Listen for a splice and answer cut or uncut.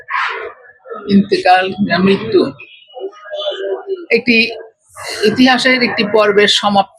uncut